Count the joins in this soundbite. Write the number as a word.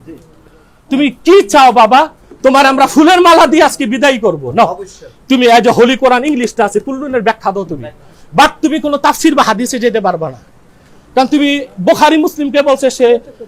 zero